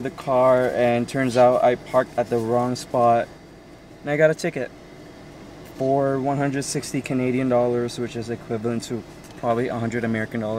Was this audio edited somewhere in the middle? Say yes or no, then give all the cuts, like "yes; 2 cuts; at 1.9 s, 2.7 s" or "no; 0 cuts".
no; 0 cuts